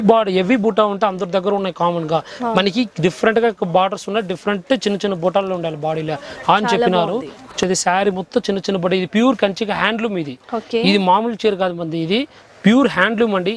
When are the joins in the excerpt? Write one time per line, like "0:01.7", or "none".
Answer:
0:07.5